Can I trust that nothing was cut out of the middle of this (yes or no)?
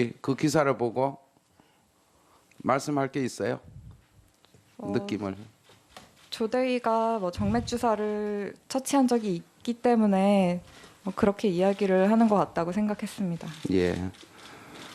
yes